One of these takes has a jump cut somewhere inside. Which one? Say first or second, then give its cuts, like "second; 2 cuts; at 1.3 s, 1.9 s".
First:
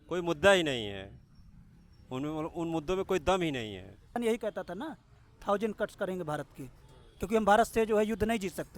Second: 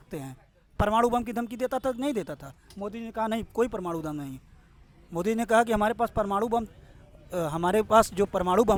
first; 1 cut; at 4.2 s